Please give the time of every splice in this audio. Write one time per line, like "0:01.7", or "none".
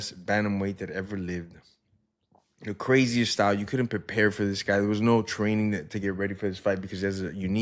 none